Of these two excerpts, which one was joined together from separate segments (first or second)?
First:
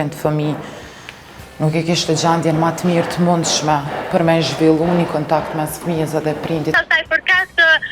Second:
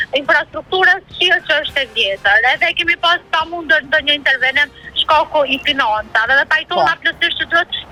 first